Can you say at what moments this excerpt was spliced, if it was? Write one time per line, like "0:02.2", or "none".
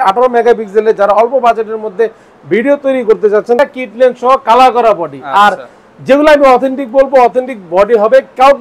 0:03.6